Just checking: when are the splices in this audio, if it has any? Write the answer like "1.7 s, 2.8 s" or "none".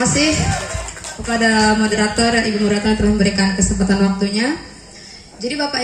none